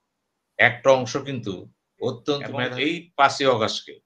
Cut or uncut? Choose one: cut